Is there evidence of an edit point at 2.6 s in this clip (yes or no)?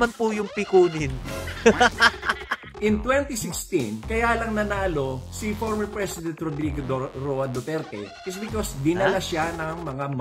yes